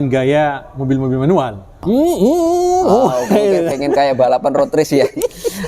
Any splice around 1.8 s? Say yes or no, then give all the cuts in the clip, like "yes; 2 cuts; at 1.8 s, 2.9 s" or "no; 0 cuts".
yes; 1 cut; at 1.8 s